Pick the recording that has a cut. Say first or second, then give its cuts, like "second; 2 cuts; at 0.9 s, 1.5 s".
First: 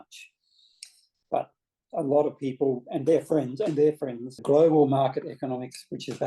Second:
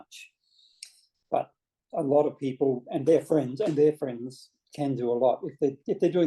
first; 1 cut; at 4.3 s